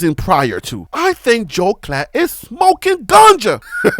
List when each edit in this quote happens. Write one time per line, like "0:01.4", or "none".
0:00.9